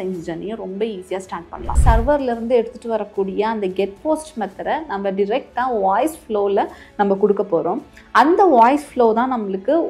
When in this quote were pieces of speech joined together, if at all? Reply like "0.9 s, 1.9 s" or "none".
1.8 s